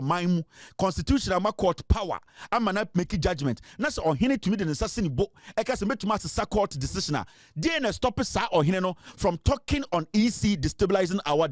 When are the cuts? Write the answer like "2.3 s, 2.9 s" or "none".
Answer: none

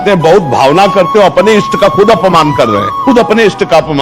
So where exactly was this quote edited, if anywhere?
2.9 s

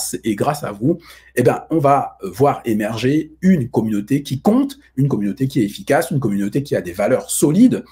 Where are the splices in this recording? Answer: none

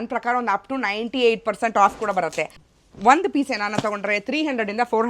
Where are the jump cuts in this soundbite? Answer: 2.6 s

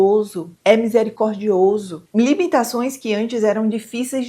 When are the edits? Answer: 2.0 s

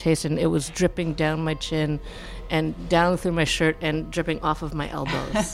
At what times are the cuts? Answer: 0.9 s

